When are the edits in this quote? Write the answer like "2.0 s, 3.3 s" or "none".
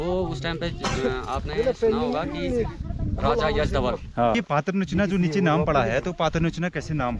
4.4 s